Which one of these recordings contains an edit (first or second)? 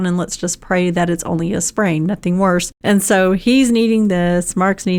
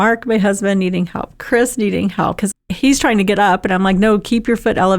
second